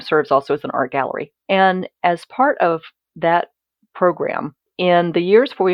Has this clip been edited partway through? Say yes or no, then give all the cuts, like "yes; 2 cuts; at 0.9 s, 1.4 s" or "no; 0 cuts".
yes; 2 cuts; at 1.3 s, 4.6 s